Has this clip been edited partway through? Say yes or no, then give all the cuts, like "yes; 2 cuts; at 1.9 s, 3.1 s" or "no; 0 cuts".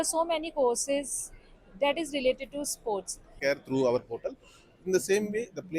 yes; 1 cut; at 3.3 s